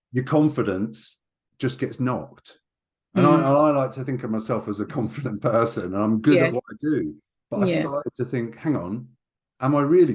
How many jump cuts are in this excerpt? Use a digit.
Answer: 0